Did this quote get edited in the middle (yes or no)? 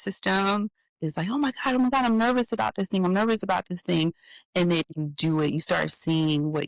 no